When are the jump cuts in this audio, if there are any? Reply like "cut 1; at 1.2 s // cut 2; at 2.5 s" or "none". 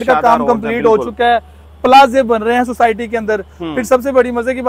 none